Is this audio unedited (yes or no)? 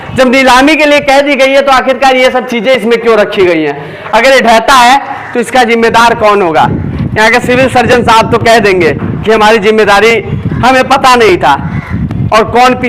yes